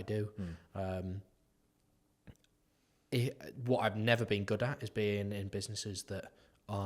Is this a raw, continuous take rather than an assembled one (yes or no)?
yes